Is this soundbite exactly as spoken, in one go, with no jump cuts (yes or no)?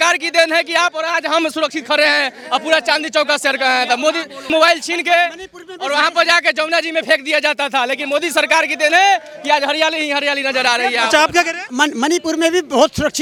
yes